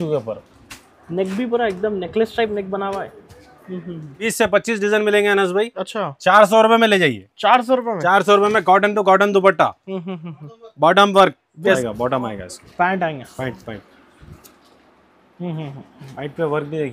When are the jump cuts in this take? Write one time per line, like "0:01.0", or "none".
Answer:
0:04.2
0:11.8